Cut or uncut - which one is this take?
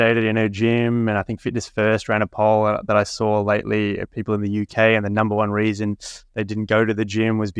uncut